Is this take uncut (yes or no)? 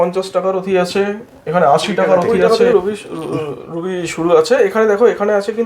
no